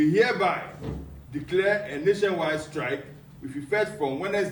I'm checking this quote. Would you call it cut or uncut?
uncut